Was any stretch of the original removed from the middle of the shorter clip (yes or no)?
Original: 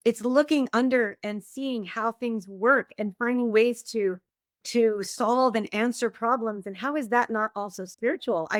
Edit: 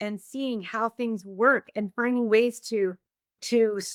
no